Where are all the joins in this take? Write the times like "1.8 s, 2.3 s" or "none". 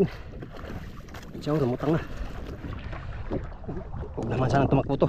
2.7 s